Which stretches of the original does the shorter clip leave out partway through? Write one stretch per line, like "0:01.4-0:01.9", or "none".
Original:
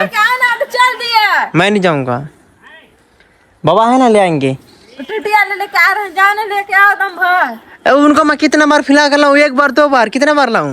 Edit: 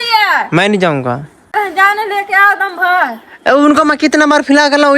0:02.6-0:05.9